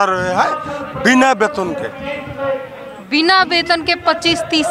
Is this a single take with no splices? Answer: yes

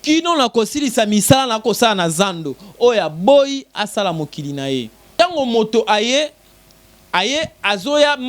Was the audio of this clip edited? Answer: yes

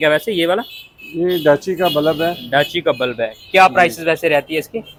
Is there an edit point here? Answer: no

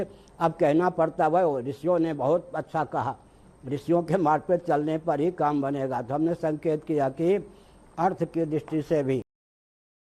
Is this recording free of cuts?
yes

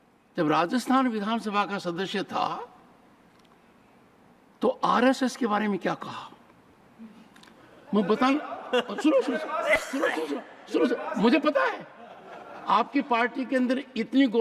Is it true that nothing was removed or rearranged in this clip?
yes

